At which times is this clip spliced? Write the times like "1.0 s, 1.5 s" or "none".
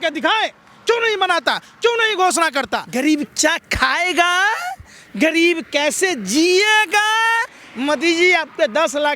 2.8 s